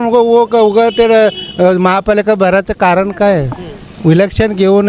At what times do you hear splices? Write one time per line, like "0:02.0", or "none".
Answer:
none